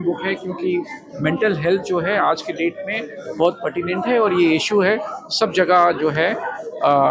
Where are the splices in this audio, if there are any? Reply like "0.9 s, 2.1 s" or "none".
none